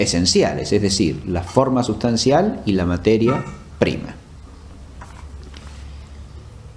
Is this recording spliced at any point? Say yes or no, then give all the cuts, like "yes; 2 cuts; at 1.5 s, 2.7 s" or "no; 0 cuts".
yes; 1 cut; at 4.8 s